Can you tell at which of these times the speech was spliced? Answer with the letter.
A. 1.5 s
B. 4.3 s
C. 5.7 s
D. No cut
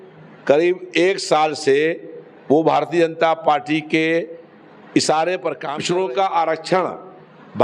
C